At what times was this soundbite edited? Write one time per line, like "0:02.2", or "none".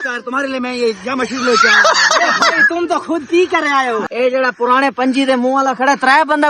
0:04.1